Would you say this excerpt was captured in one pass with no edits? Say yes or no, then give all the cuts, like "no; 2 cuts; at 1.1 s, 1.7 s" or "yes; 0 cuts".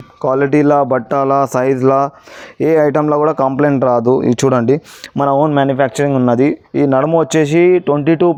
yes; 0 cuts